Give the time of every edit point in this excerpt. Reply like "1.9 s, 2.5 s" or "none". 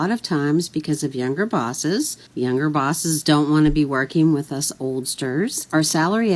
none